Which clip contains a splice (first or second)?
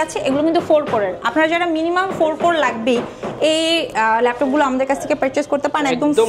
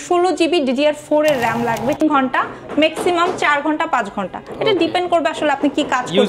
second